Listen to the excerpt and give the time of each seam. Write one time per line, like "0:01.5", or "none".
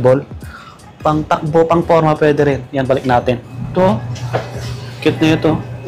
0:03.5